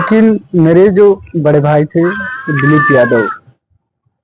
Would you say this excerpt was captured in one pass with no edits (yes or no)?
yes